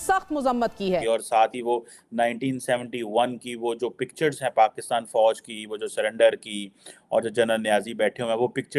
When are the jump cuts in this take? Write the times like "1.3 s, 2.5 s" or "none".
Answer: 1.0 s